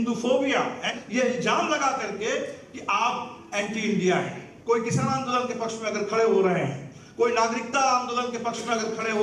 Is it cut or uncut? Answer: cut